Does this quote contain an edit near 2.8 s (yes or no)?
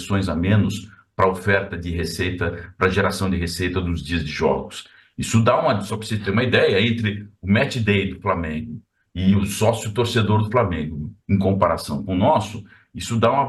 no